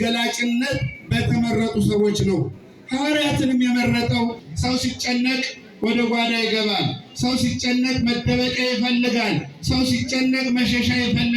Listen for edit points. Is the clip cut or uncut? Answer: cut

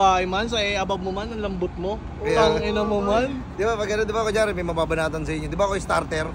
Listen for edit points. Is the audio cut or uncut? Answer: uncut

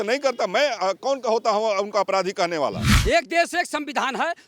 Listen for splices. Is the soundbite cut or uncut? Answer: cut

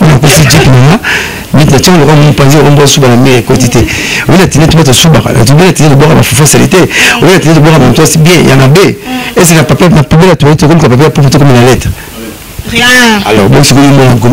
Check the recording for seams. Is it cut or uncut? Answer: uncut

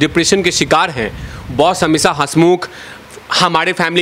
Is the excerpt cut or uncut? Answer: uncut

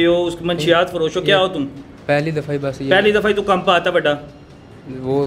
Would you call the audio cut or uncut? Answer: uncut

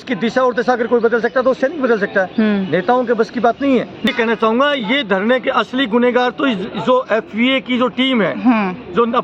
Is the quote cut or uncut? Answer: cut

